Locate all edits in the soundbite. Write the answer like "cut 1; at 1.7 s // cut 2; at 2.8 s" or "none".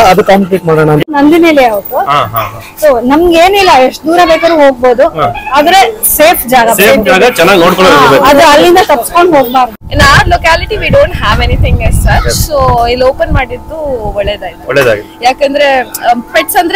cut 1; at 1.1 s // cut 2; at 9.7 s